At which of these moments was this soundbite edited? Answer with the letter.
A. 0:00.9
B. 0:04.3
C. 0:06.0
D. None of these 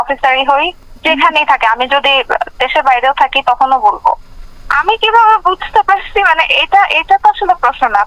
D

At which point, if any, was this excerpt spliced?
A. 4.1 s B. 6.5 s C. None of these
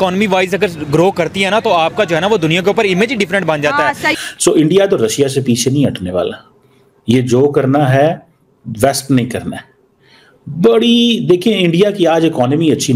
A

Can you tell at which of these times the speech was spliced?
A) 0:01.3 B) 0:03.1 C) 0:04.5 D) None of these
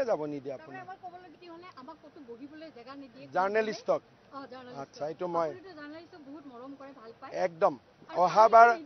A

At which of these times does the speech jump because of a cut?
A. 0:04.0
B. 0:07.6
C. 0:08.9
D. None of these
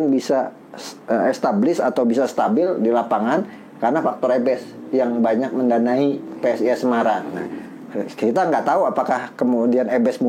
D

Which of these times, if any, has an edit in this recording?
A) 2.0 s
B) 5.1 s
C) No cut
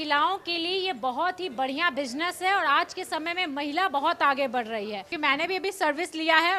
B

